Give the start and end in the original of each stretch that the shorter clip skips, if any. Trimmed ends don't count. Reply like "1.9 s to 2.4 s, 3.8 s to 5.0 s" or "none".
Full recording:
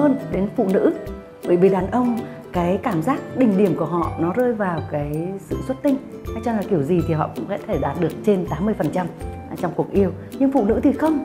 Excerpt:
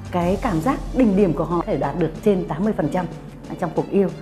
4.1 s to 7.7 s